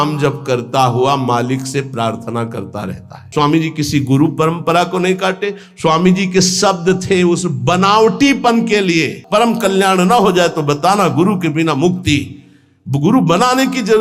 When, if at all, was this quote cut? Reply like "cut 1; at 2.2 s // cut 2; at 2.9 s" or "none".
cut 1; at 3.2 s // cut 2; at 9.2 s

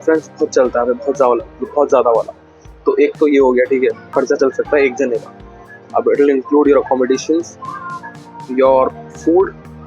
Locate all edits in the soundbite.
cut 1; at 4.1 s

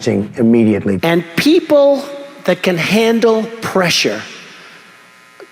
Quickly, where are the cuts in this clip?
cut 1; at 1.0 s

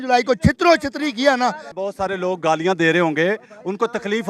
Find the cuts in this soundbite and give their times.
cut 1; at 1.7 s

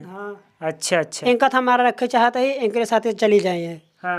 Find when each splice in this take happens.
cut 1; at 1.1 s

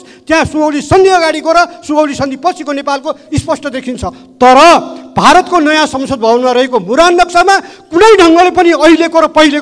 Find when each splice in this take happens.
none

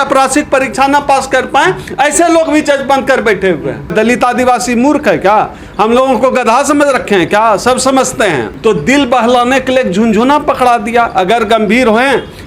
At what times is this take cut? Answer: cut 1; at 3.9 s // cut 2; at 8.5 s

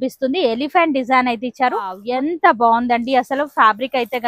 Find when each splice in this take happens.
cut 1; at 2.0 s

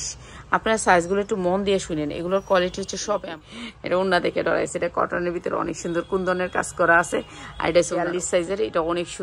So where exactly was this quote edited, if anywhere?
cut 1; at 3.3 s // cut 2; at 8.0 s

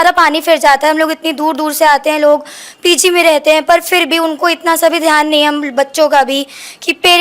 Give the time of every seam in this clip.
none

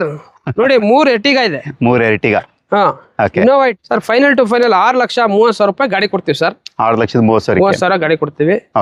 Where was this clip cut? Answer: cut 1; at 3.5 s

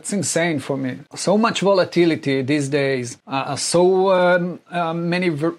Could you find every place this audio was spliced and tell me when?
cut 1; at 1.1 s // cut 2; at 3.2 s

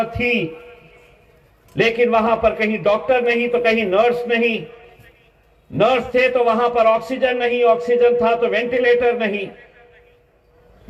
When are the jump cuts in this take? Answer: none

